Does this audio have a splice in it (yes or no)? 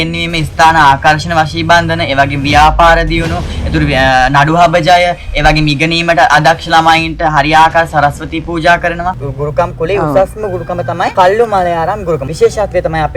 yes